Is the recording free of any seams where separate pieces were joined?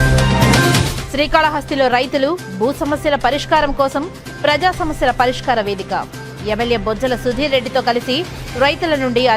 no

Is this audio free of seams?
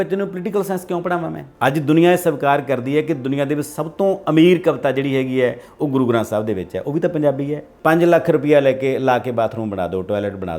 no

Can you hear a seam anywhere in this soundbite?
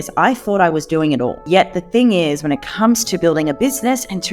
yes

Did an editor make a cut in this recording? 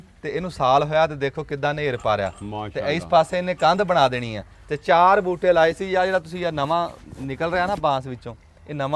no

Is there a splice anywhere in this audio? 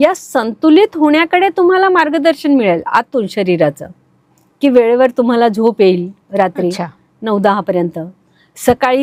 no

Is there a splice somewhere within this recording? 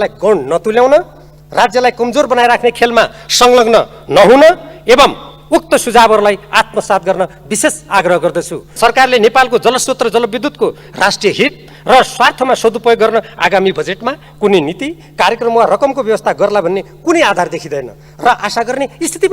yes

